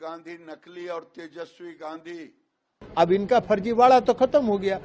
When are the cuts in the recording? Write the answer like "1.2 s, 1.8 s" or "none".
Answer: 2.8 s